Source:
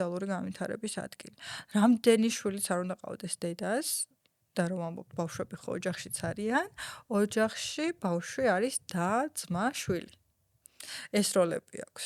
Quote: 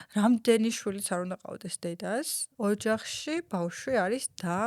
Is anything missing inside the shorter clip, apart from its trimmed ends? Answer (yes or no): yes